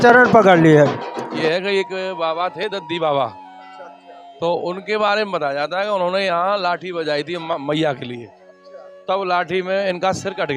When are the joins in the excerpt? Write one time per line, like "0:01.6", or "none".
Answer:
0:01.3